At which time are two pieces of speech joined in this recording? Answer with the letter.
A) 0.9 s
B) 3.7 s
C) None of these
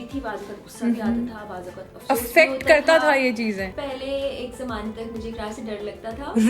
B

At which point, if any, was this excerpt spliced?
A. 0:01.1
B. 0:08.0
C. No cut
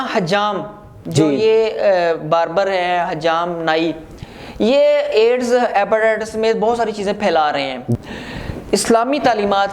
B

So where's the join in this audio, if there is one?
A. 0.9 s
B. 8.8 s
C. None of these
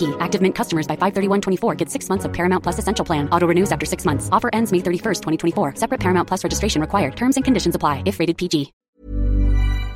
B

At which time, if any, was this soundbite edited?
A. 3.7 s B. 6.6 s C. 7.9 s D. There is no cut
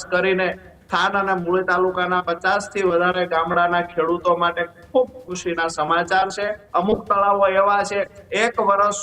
B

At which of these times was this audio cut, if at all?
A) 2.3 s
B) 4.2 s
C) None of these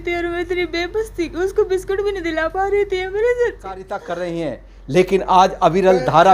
B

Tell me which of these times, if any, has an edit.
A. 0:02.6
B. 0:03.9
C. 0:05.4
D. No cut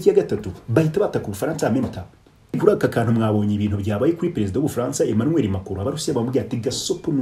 A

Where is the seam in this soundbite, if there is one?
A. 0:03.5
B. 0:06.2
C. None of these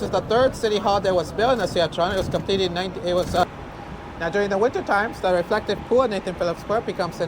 A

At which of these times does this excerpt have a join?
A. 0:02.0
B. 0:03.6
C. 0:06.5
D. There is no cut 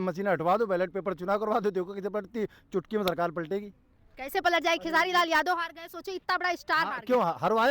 D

